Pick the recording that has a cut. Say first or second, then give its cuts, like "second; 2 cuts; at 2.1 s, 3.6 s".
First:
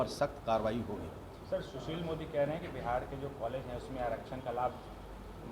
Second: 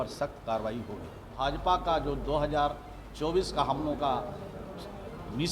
second; 1 cut; at 1.3 s